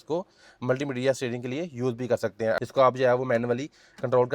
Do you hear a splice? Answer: yes; 1 cut; at 2.6 s

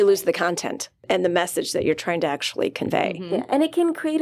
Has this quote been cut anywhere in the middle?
yes; 1 cut; at 1.0 s

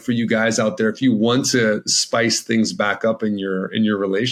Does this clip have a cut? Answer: no; 0 cuts

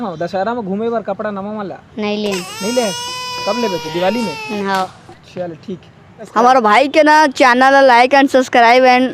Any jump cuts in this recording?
yes; 1 cut; at 6.2 s

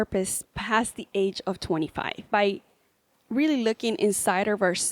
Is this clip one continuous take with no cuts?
no; 1 cut; at 2.3 s

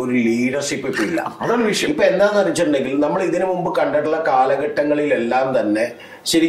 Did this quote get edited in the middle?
no; 0 cuts

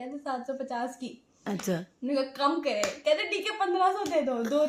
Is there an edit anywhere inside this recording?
no; 0 cuts

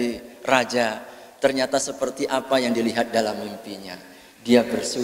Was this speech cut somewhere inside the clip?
no; 0 cuts

